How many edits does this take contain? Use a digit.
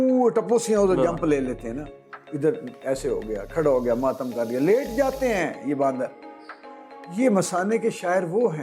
0